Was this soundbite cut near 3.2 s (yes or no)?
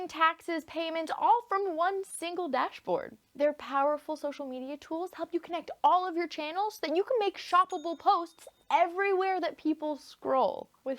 yes